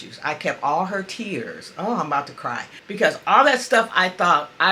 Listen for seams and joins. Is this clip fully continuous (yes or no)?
no